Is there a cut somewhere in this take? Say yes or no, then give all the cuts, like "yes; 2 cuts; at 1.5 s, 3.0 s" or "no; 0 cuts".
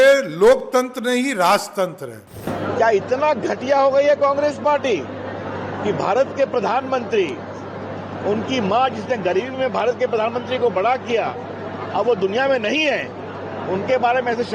yes; 1 cut; at 2.5 s